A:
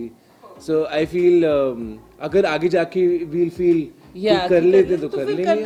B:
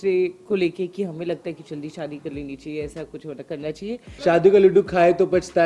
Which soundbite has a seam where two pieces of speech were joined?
B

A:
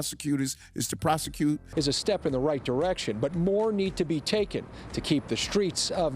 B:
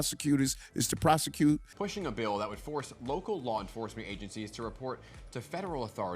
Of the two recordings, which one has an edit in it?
B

